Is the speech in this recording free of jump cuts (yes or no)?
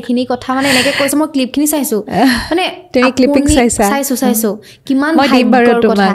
yes